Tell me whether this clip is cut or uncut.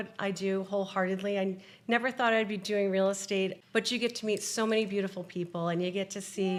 uncut